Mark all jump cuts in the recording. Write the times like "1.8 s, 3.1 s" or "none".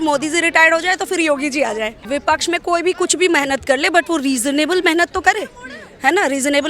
2.1 s